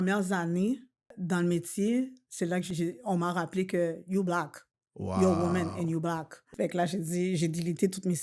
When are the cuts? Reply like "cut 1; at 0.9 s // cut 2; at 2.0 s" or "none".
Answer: cut 1; at 1.1 s // cut 2; at 2.7 s // cut 3; at 6.4 s